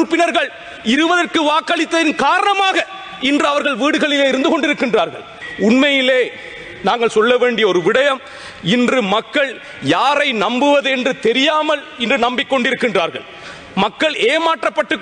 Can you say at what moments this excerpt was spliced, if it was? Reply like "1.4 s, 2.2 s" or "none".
5.4 s